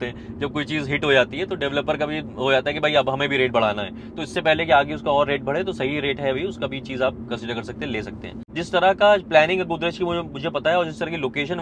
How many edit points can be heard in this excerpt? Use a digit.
1